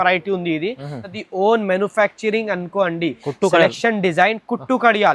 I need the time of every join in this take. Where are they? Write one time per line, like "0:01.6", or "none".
0:01.2